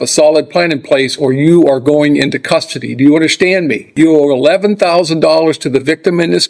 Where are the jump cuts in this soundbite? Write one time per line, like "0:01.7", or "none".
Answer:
0:03.9